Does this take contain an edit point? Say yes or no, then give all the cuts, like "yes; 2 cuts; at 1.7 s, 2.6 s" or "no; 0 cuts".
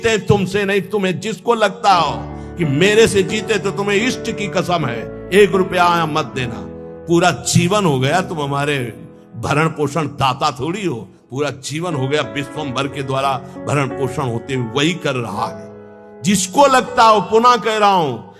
no; 0 cuts